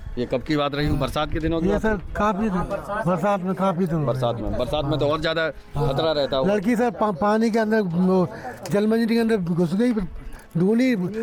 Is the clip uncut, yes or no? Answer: yes